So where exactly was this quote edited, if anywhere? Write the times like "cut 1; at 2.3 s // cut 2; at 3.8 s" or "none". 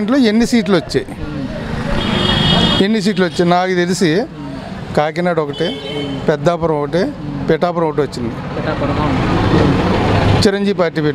none